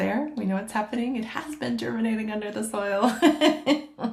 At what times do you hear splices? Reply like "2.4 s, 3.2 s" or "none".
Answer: none